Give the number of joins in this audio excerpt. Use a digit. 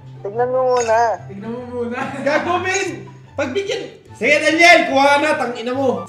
1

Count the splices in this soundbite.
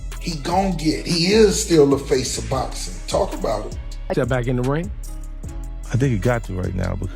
1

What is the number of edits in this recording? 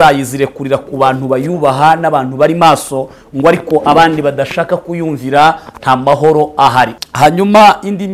1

